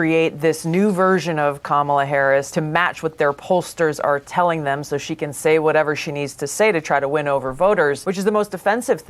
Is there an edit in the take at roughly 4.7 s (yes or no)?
no